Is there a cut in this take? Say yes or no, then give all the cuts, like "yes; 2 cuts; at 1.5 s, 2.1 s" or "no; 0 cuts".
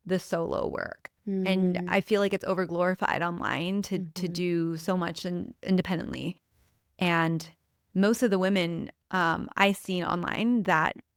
no; 0 cuts